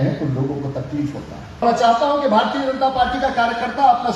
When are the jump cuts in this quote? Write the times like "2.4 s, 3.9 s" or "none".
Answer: 1.6 s